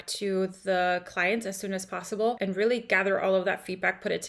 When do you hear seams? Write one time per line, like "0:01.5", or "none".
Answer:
0:02.4